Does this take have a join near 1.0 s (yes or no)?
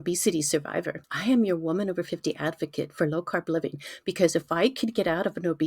yes